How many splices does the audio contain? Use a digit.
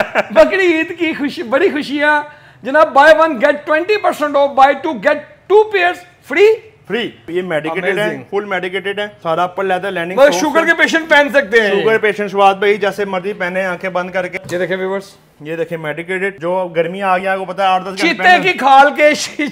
2